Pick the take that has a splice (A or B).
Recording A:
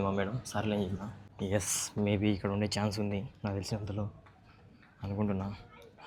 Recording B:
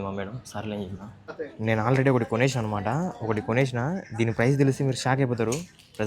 B